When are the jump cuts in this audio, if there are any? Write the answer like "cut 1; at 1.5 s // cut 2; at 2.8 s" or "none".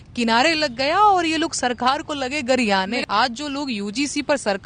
cut 1; at 3.0 s